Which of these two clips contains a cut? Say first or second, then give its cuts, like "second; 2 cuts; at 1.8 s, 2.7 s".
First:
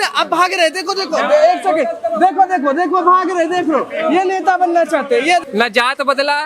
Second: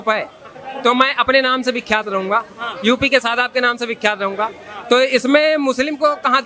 first; 1 cut; at 5.4 s